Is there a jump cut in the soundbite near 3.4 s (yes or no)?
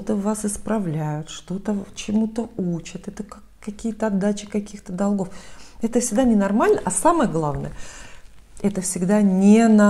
no